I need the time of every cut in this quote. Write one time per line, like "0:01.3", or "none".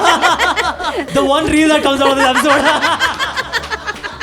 0:01.0